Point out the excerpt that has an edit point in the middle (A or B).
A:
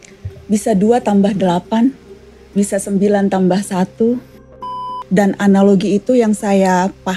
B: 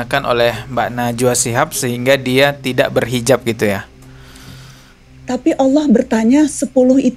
A